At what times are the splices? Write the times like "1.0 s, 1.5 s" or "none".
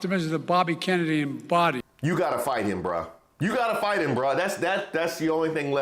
1.9 s